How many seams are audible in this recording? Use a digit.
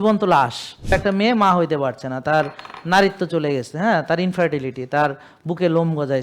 1